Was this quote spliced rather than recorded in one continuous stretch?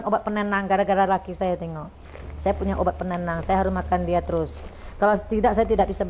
no; 0 cuts

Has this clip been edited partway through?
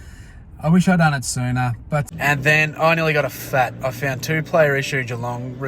yes; 1 cut; at 2.1 s

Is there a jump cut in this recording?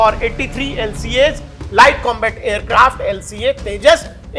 no; 0 cuts

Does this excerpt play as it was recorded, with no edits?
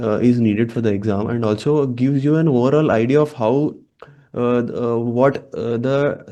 yes; 0 cuts

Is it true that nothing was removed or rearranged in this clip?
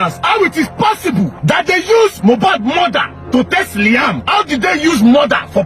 no; 3 cuts; at 1.3 s, 3.2 s, 4.2 s

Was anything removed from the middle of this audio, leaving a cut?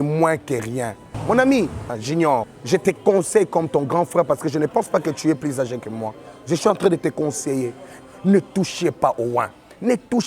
yes; 3 cuts; at 1.1 s, 2.2 s, 7.9 s

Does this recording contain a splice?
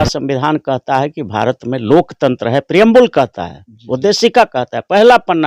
no; 0 cuts

